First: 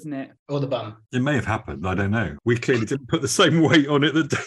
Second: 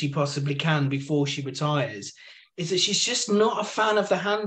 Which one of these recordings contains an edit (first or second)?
first